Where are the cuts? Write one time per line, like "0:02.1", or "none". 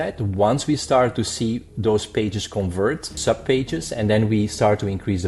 0:03.2